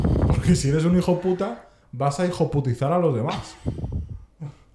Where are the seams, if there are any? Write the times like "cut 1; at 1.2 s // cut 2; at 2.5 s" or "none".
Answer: none